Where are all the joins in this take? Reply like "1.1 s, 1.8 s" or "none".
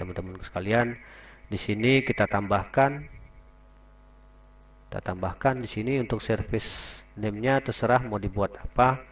none